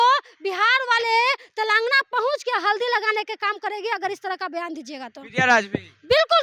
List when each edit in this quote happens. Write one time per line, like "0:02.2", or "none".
none